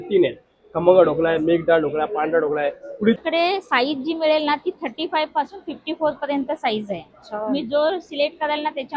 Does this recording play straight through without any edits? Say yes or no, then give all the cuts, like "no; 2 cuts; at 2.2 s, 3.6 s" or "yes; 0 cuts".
no; 1 cut; at 3.2 s